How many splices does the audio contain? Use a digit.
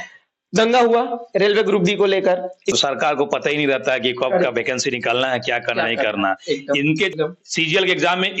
2